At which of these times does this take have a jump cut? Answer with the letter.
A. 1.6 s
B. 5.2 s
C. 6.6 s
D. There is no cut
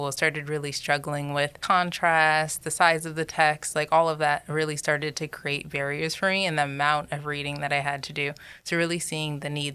A